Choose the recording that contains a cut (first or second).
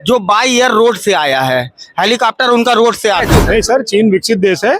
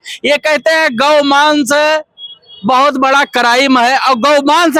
first